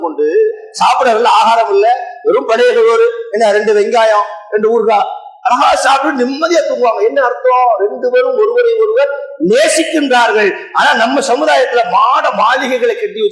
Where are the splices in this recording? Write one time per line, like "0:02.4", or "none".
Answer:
none